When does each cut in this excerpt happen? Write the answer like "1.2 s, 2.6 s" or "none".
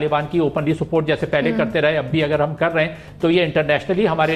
none